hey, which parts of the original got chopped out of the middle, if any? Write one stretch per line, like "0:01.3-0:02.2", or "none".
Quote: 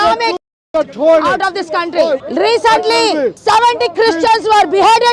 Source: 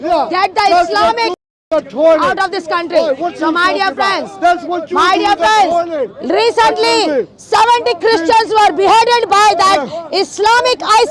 0:03.2-0:06.2
0:07.3-0:07.4